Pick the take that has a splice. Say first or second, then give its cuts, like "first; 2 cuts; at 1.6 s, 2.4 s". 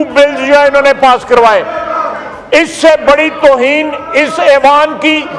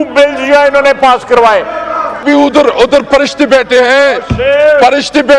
second; 1 cut; at 2.2 s